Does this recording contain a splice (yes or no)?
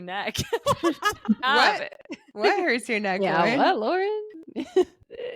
yes